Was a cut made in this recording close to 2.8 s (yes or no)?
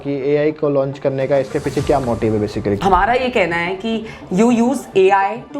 yes